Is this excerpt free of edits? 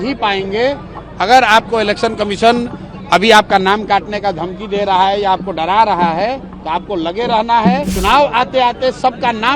no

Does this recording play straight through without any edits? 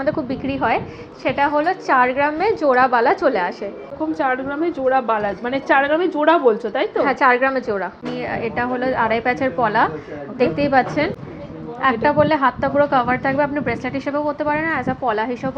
no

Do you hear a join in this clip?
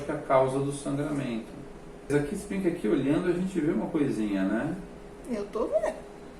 yes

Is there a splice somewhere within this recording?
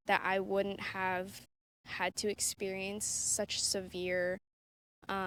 no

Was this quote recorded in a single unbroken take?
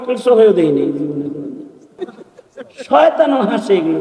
no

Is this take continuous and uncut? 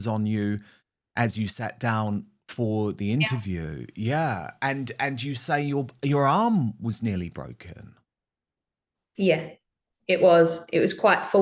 yes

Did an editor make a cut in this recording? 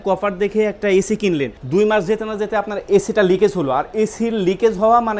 yes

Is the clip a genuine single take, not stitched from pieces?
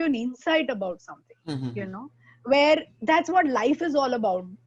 yes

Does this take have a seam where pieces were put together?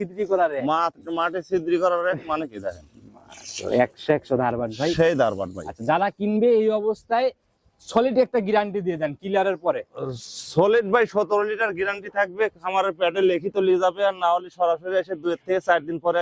no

